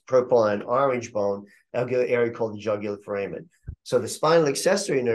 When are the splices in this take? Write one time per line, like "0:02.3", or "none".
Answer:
none